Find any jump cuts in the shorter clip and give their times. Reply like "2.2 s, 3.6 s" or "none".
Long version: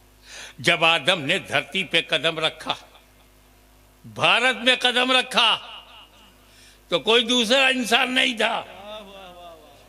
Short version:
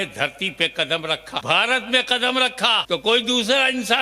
1.4 s, 2.8 s